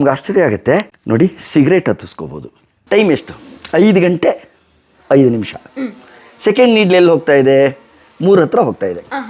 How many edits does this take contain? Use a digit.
2